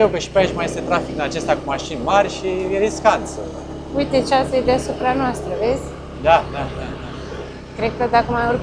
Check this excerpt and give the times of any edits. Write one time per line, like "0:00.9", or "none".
none